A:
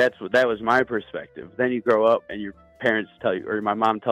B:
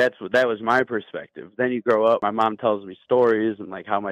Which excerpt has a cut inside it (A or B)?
B